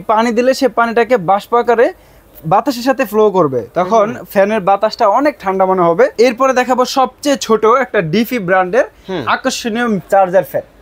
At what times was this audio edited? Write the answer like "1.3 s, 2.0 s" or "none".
6.1 s